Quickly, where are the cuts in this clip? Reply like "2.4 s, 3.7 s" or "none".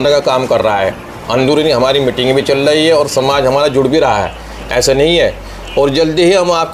none